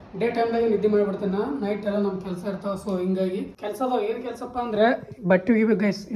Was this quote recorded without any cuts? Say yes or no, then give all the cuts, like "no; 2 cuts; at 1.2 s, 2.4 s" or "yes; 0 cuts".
no; 1 cut; at 3.5 s